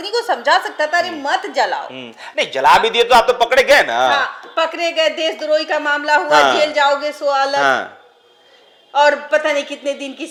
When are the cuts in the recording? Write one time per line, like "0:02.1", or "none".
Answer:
none